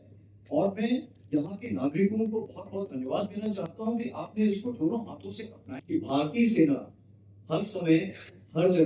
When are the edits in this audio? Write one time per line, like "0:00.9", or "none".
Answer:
0:05.7